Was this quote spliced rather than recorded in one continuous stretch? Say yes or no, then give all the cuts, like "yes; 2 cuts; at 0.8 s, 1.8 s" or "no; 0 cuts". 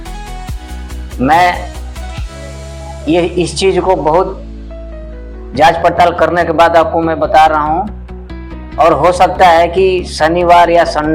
no; 0 cuts